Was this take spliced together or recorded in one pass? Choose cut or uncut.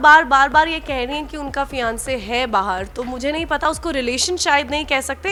uncut